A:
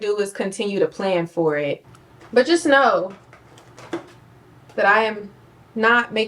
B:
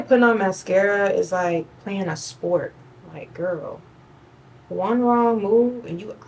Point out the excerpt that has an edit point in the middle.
A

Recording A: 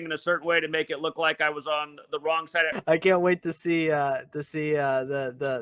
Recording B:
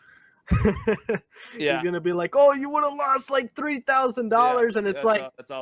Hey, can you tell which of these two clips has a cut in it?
A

